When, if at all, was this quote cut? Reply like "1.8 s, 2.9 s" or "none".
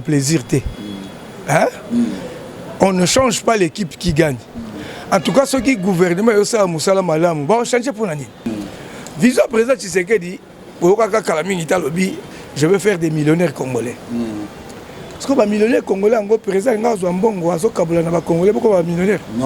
8.5 s